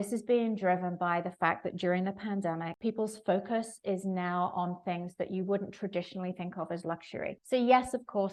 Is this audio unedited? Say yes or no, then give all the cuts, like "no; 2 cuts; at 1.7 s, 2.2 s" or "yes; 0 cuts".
yes; 0 cuts